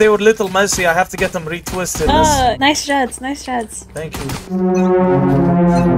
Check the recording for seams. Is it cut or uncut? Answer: cut